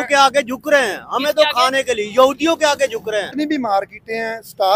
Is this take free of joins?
no; 1 cut; at 3.3 s

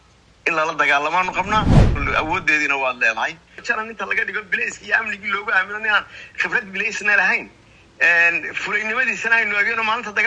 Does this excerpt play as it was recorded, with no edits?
no; 2 cuts; at 1.8 s, 3.5 s

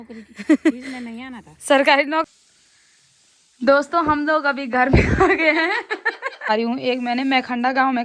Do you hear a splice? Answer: yes; 2 cuts; at 2.3 s, 6.5 s

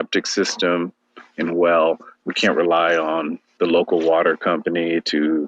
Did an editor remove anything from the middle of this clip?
no; 0 cuts

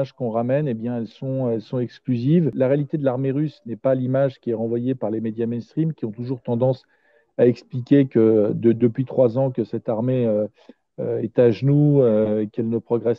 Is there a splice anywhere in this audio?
yes; 1 cut; at 2.5 s

